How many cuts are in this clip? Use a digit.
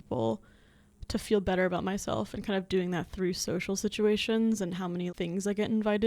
1